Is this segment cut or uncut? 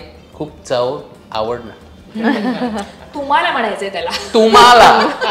uncut